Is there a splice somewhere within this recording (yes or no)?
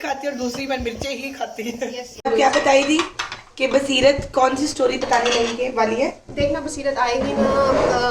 yes